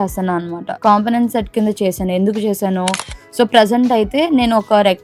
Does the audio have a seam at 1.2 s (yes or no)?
no